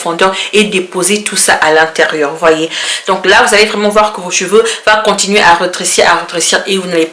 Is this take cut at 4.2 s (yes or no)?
no